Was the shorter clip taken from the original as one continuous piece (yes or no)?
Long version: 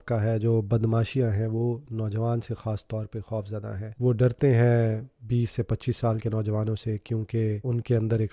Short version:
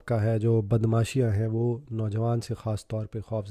yes